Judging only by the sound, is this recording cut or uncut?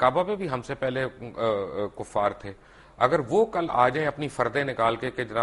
uncut